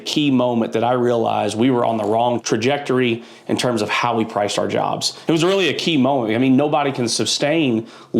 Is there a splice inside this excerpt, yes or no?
yes